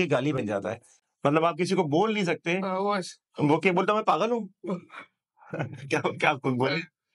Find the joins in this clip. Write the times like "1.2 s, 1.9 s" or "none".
none